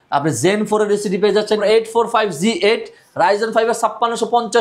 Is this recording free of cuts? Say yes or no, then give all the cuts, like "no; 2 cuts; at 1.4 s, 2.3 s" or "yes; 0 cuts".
no; 1 cut; at 1.6 s